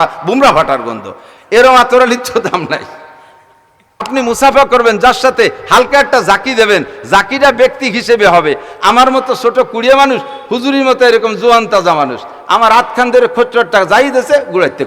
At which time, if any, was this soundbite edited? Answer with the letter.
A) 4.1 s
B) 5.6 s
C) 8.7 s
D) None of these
A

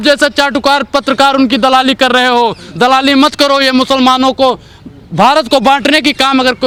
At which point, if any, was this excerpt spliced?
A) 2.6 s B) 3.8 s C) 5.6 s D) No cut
D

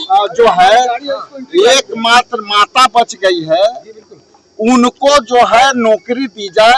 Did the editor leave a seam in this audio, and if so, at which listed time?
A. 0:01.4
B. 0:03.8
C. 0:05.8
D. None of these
D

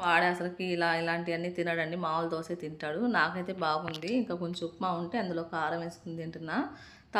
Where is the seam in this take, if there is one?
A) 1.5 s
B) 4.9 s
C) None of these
C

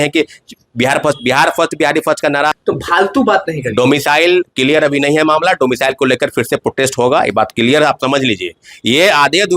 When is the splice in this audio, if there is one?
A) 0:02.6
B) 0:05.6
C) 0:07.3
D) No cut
A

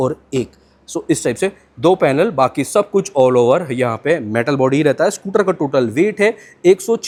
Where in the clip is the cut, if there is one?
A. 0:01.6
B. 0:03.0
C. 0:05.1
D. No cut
D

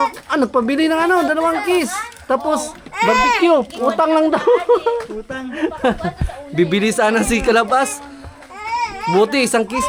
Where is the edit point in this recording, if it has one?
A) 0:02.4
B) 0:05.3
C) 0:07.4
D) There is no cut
D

